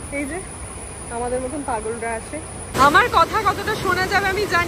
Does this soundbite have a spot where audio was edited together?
yes; 1 cut; at 2.7 s

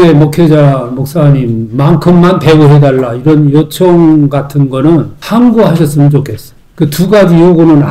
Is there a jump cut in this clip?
no; 0 cuts

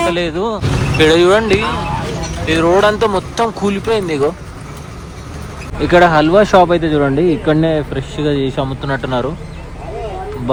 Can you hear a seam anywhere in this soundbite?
no; 0 cuts

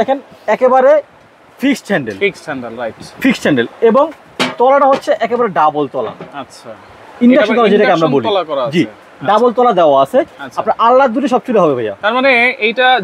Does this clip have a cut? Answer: no; 0 cuts

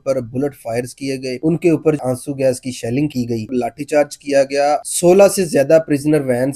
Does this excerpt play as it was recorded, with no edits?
no; 3 cuts; at 2.0 s, 3.5 s, 4.9 s

